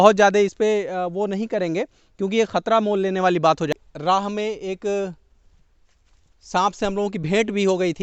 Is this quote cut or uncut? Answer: cut